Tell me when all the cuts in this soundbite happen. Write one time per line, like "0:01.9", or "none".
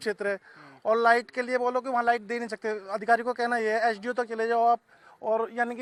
none